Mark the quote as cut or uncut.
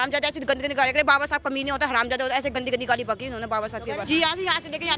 cut